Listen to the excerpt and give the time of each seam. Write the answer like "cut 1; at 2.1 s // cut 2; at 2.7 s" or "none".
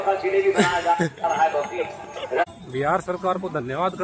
cut 1; at 2.5 s